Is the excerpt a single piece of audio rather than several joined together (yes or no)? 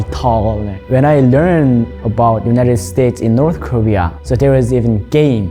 no